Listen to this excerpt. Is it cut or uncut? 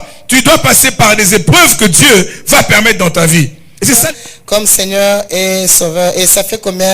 cut